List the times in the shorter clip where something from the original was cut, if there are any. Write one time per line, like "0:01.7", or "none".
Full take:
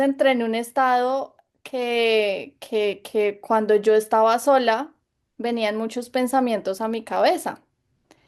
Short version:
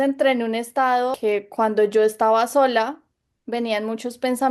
0:01.2